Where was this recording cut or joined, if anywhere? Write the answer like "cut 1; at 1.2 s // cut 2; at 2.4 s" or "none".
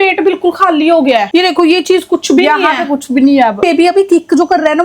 cut 1; at 3.6 s